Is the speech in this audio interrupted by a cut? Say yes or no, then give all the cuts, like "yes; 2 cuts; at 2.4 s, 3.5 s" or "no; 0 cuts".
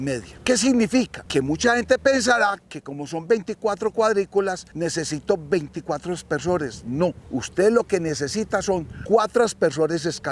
yes; 4 cuts; at 1.2 s, 4.7 s, 7.2 s, 8.9 s